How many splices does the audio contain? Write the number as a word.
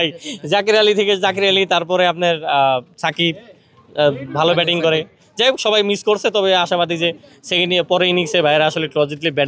zero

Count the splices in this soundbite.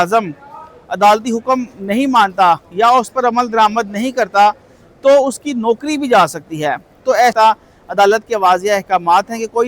one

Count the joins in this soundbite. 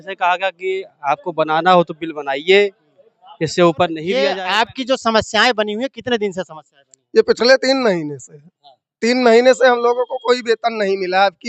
one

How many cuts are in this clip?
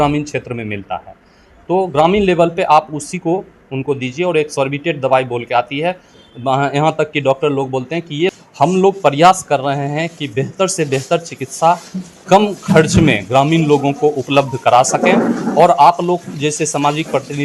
one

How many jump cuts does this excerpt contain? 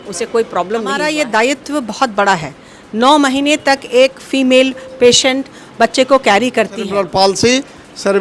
two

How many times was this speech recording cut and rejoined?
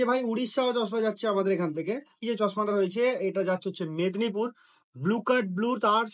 one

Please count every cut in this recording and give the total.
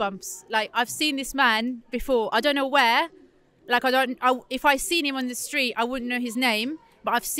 zero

